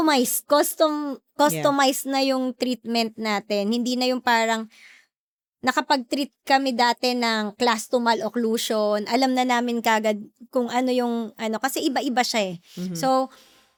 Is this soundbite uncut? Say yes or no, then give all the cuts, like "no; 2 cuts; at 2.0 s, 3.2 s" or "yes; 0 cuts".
yes; 0 cuts